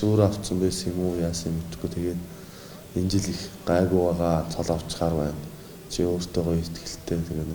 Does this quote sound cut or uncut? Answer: uncut